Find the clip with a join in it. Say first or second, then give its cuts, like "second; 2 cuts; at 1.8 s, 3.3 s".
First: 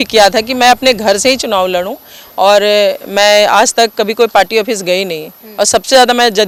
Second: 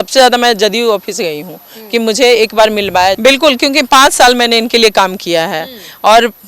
second; 1 cut; at 3.2 s